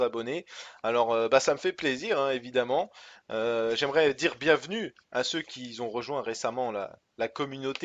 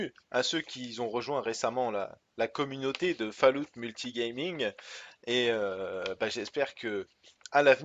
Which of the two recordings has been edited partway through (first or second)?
first